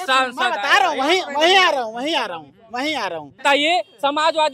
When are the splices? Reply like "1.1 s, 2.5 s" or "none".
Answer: 3.4 s